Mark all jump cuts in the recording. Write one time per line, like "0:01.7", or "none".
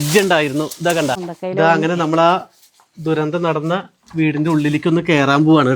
0:01.3